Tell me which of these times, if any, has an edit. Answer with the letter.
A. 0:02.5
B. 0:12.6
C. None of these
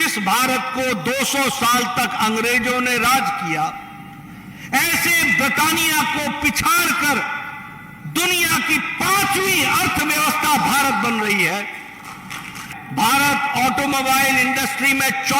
B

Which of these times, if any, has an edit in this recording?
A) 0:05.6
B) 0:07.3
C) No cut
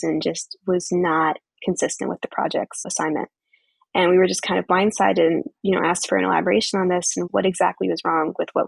B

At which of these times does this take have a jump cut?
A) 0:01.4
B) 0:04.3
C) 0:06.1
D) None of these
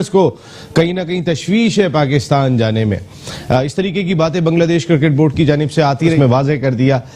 C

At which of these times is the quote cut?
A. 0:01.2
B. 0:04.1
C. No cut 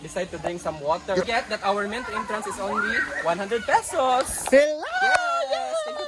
A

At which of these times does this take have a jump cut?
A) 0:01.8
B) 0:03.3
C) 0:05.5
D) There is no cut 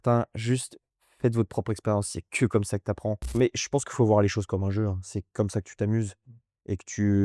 B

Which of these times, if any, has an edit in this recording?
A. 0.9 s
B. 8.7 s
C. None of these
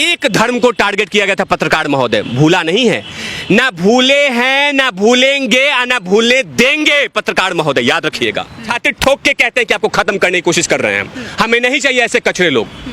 B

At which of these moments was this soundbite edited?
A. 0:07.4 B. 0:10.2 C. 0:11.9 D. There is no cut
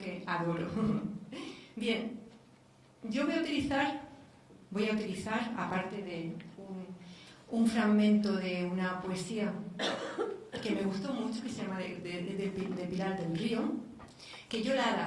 A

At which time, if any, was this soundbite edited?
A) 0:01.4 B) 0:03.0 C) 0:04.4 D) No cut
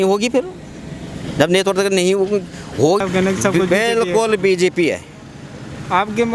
B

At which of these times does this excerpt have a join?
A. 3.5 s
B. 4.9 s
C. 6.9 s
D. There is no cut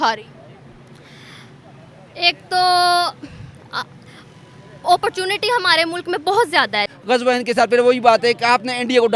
C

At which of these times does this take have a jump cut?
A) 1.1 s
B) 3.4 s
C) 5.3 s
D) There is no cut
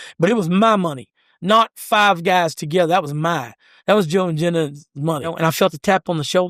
C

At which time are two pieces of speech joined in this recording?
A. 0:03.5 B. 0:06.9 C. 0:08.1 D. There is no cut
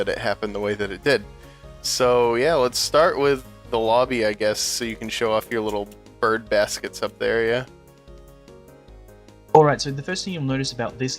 C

